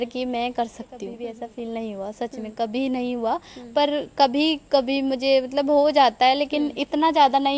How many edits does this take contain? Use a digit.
1